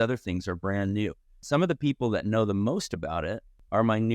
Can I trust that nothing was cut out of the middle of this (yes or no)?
no